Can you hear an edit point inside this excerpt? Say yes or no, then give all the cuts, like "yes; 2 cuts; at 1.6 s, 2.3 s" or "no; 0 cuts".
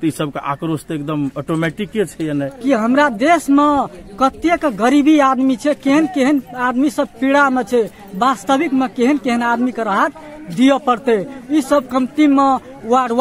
yes; 1 cut; at 2.5 s